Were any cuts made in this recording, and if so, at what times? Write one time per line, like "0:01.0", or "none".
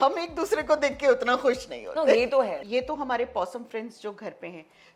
0:02.6